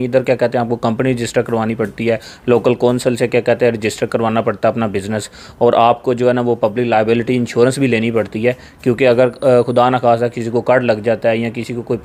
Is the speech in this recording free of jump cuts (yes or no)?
yes